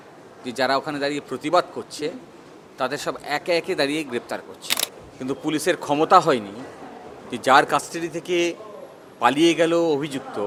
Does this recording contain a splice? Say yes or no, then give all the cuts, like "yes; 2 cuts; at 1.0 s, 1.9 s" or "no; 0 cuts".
no; 0 cuts